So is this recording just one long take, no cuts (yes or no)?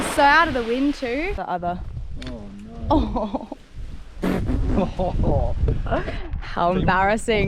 no